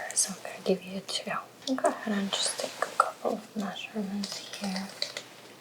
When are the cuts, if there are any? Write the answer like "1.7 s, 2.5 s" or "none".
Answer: 1.5 s